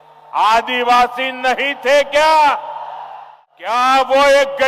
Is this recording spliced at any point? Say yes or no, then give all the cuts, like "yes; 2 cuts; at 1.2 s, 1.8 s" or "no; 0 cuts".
yes; 1 cut; at 3.8 s